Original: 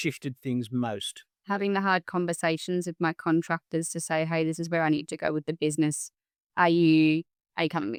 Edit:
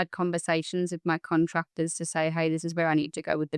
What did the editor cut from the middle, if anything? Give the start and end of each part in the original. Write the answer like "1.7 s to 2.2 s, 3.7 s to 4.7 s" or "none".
none